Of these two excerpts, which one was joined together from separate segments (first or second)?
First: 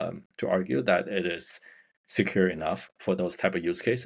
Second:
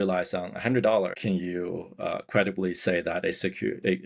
second